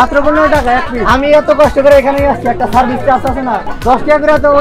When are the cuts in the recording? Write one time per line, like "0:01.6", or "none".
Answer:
0:01.0
0:03.6